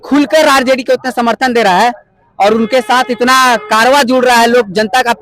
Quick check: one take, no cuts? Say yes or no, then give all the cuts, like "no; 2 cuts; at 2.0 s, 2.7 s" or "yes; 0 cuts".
yes; 0 cuts